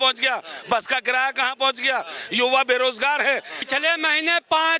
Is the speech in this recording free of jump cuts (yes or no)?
no